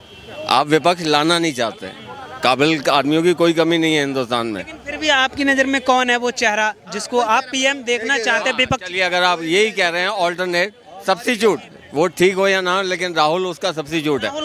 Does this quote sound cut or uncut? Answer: uncut